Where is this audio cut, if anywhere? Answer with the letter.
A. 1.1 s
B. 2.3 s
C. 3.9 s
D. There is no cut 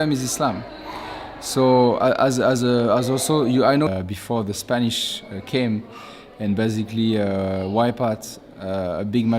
C